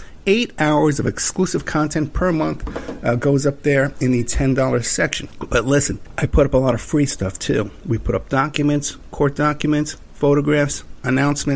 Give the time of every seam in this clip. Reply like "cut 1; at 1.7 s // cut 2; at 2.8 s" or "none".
cut 1; at 5.3 s // cut 2; at 6.0 s